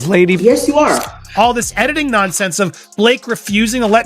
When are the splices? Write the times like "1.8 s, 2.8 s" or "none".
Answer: 1.2 s